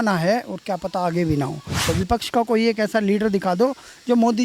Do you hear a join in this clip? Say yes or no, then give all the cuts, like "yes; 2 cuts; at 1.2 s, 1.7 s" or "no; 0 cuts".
yes; 1 cut; at 1.8 s